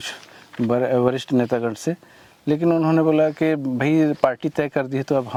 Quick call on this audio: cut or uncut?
uncut